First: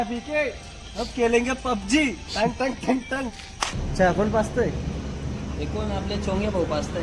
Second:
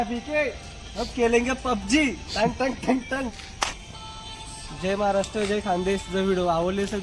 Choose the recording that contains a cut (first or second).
first